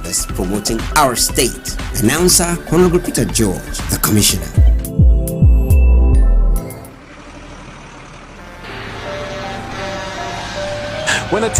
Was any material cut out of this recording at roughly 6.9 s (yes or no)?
yes